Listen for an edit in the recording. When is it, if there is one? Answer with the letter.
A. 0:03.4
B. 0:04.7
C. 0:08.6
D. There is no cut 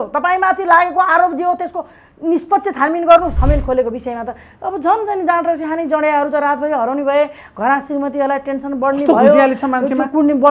A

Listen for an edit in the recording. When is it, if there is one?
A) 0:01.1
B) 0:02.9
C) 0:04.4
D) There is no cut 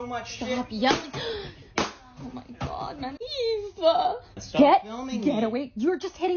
C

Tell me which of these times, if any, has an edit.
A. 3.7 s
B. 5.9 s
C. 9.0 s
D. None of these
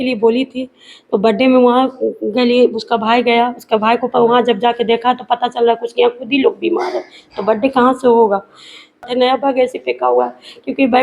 C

